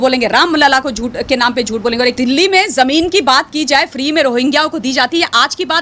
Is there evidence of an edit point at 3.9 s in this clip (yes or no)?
no